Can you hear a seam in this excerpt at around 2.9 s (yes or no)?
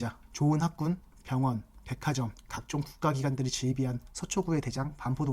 no